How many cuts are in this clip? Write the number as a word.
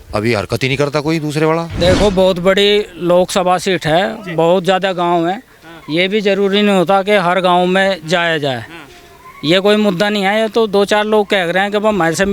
one